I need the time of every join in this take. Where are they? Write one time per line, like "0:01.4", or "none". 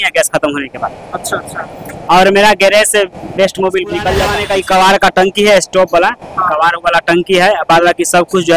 0:04.4